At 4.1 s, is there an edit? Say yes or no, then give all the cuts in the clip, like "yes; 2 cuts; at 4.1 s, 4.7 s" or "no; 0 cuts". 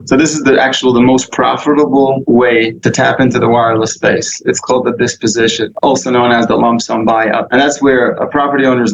no; 3 cuts; at 2.4 s, 5.7 s, 7.4 s